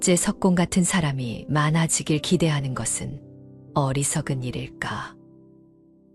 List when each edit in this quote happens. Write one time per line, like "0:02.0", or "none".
0:05.1